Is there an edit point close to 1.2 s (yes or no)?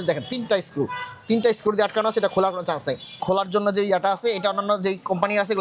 no